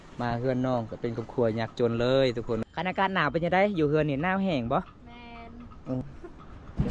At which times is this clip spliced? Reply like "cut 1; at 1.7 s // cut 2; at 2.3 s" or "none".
cut 1; at 2.6 s // cut 2; at 6.0 s